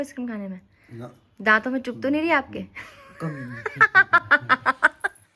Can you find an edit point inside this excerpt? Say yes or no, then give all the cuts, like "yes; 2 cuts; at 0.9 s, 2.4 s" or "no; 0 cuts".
no; 0 cuts